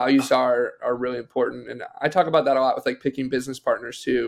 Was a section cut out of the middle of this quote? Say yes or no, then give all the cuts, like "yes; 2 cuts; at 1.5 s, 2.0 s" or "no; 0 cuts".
no; 0 cuts